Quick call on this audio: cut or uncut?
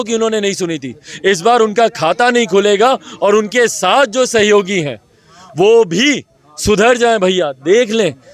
uncut